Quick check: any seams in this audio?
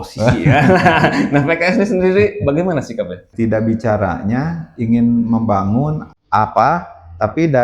yes; 1 cut; at 3.2 s

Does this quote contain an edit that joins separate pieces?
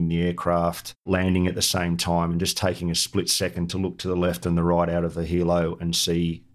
no; 0 cuts

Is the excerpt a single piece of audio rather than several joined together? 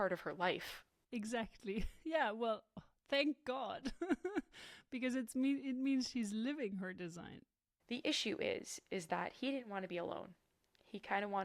no; 1 cut; at 7.7 s

